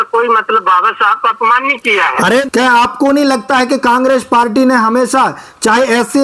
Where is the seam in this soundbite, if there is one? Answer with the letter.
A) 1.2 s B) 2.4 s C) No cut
B